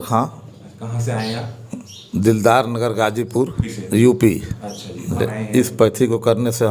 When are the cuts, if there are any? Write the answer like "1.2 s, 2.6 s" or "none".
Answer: 3.7 s, 5.2 s